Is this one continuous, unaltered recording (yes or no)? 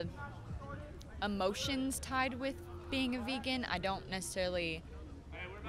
yes